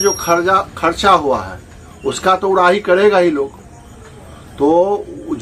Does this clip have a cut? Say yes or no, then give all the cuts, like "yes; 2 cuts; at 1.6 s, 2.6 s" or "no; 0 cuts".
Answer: no; 0 cuts